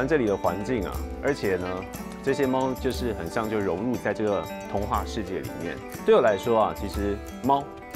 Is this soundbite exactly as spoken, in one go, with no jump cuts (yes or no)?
yes